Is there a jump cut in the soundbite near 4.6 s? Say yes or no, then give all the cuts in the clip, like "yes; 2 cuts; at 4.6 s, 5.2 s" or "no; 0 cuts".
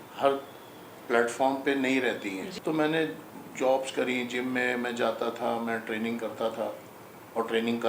no; 1 cut; at 2.5 s